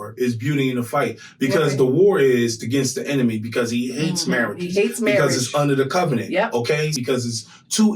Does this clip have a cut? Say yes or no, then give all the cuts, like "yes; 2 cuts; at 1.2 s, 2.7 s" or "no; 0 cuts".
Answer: yes; 1 cut; at 6.9 s